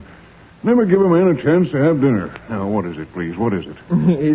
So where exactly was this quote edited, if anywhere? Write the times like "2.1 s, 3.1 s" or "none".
2.9 s